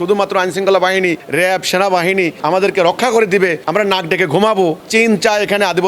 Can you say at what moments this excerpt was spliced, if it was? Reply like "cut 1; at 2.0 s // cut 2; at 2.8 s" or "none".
cut 1; at 4.8 s